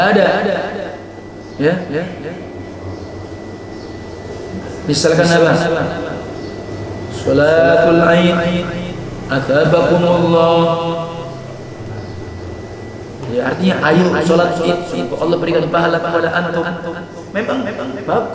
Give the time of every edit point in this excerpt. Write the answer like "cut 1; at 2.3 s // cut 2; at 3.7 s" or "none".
none